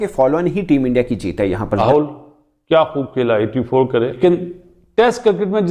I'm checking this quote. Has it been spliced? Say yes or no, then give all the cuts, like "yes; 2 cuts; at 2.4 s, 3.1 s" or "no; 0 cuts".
yes; 2 cuts; at 1.8 s, 4.2 s